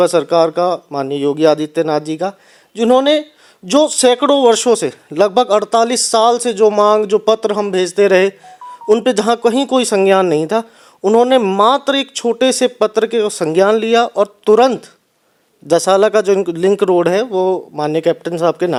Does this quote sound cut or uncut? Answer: uncut